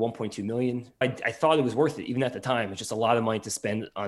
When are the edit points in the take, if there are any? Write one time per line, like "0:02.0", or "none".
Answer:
0:01.0